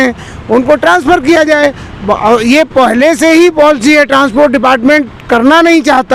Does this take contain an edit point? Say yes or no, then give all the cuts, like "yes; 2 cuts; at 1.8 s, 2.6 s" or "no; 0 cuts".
no; 0 cuts